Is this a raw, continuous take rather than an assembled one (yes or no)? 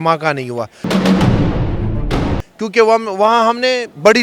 no